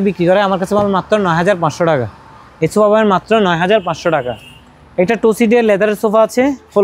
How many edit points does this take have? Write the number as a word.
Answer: zero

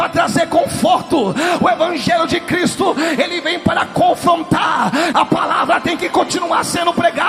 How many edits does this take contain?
one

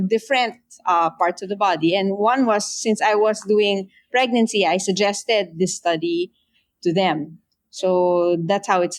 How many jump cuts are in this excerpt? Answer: zero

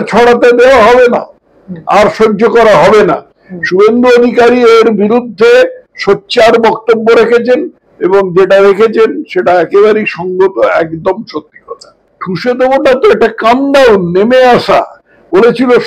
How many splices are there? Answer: one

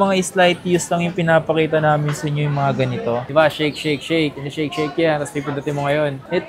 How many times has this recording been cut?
one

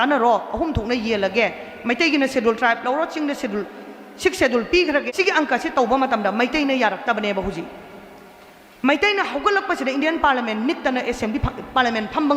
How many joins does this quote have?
one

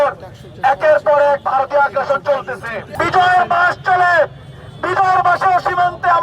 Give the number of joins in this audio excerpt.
one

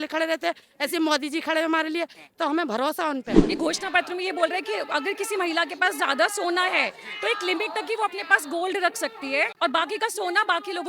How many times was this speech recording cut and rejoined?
two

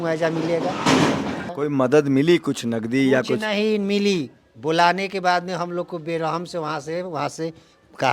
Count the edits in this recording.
one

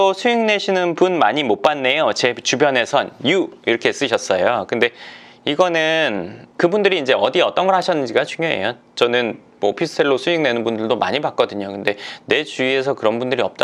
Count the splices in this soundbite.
zero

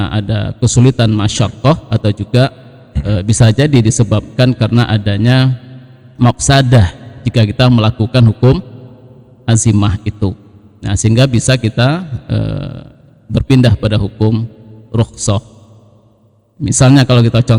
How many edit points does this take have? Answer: zero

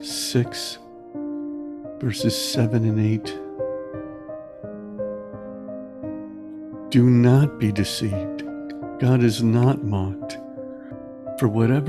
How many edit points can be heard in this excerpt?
two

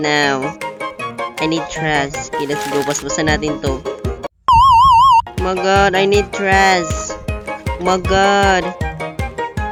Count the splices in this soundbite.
zero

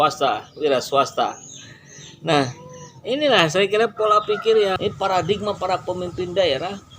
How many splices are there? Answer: one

